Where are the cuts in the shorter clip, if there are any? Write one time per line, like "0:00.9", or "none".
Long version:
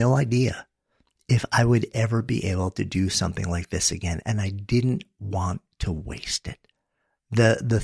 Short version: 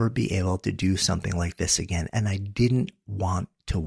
none